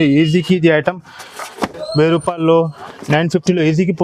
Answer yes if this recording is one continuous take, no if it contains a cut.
yes